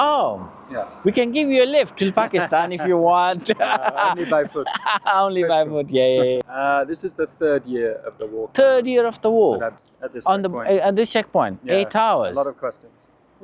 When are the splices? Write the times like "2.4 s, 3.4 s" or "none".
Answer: 6.4 s, 8.4 s, 9.8 s